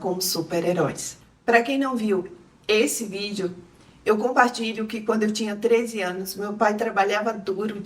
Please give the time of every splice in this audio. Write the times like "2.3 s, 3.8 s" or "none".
none